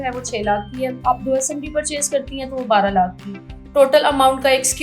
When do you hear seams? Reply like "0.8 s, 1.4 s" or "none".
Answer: 1.0 s